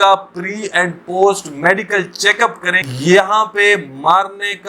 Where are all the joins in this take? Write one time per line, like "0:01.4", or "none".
0:02.8

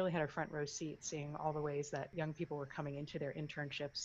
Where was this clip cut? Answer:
0:02.1

